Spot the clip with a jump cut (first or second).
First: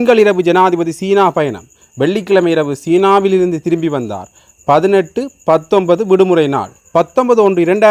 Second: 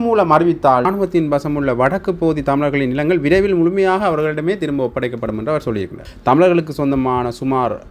second